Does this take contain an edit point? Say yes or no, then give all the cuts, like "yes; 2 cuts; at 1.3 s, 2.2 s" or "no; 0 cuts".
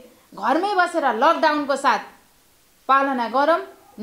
no; 0 cuts